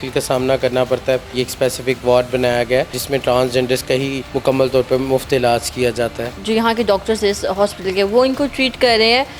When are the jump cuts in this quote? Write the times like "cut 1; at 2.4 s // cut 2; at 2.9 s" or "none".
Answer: cut 1; at 1.3 s // cut 2; at 3.0 s // cut 3; at 4.2 s // cut 4; at 6.3 s